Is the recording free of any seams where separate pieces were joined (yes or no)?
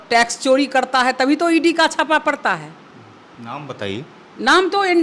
yes